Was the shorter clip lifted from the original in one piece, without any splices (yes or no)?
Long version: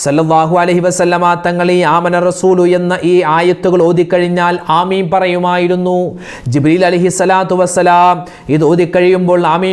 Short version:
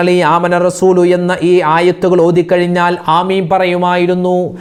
yes